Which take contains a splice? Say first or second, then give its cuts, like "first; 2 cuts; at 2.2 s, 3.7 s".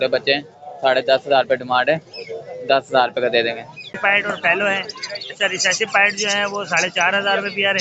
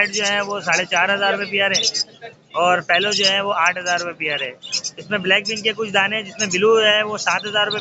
first; 1 cut; at 3.9 s